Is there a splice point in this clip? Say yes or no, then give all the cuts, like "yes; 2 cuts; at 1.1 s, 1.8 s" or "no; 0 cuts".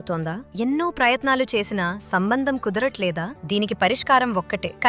yes; 1 cut; at 3.3 s